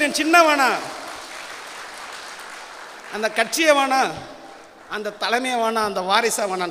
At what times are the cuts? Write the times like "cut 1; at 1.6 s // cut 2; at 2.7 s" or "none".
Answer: none